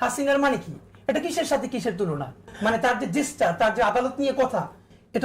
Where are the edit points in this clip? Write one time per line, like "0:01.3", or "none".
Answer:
0:02.5